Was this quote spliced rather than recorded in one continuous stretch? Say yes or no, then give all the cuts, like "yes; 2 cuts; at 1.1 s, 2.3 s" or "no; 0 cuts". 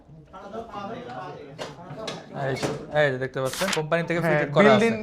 yes; 1 cut; at 3.7 s